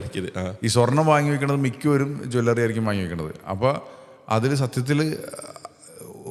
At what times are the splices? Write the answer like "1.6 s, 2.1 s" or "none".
none